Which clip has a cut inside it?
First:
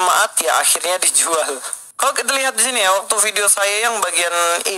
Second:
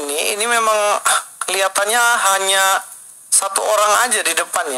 first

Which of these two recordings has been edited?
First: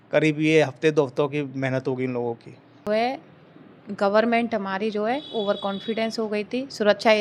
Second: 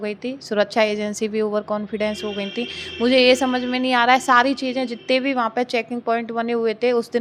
first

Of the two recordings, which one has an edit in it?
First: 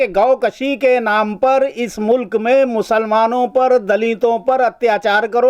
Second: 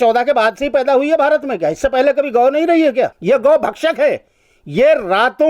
second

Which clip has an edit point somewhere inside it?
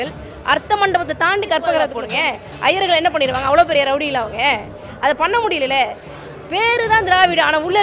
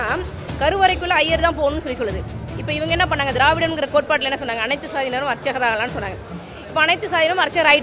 first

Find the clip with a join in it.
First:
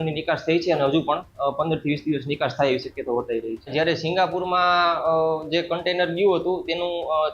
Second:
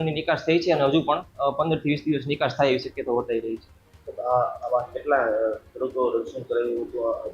first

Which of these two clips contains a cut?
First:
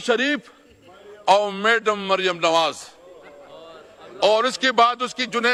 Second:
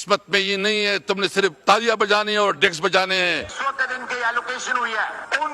second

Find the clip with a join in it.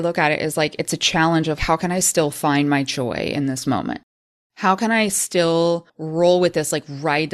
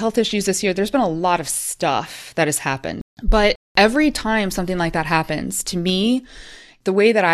first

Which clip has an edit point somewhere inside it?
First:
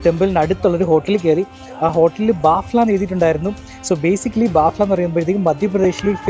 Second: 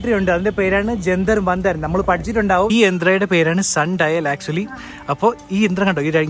second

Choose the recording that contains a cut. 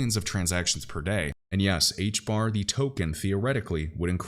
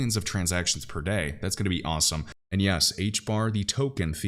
first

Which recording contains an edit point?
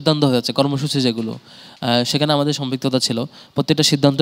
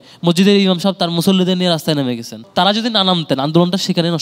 second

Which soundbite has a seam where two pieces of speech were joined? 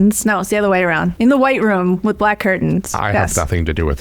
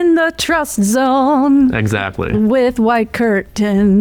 first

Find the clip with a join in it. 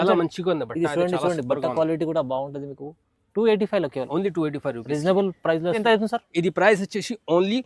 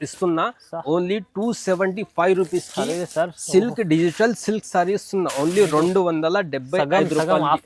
first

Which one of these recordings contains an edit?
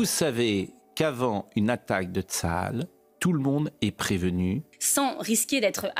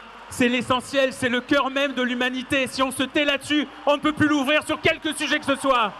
first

